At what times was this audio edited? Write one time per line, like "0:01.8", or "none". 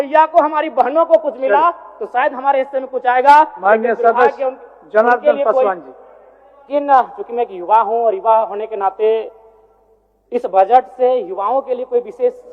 0:06.7